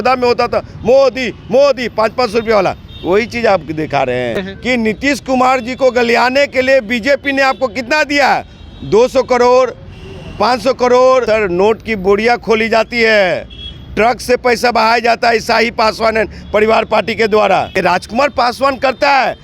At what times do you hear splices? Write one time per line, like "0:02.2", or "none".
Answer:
0:04.4
0:11.2
0:17.8